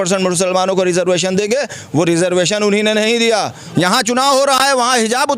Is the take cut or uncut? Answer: cut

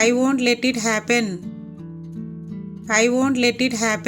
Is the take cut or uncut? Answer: cut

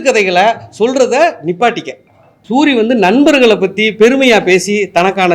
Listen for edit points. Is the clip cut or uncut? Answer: cut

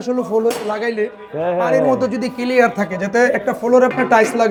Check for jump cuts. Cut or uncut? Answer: uncut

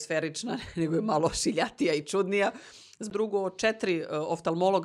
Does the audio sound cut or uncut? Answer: cut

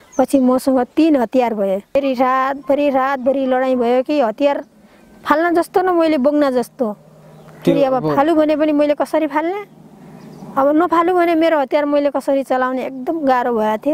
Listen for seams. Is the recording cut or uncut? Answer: cut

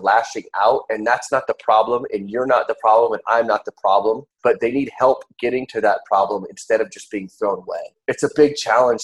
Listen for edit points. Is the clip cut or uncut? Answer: cut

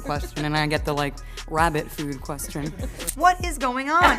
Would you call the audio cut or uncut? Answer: cut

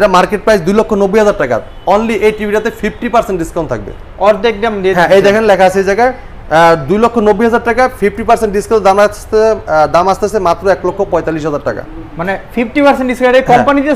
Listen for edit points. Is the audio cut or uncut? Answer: uncut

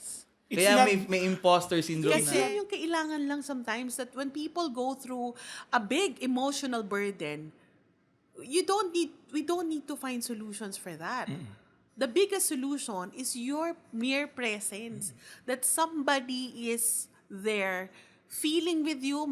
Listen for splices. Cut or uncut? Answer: cut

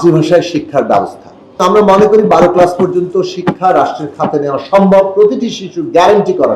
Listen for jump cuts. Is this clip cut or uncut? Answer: cut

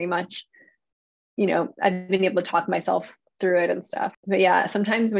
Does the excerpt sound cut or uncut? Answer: cut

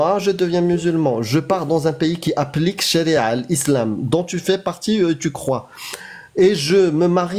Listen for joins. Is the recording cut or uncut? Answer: uncut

